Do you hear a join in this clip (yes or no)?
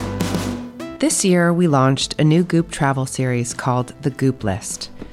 yes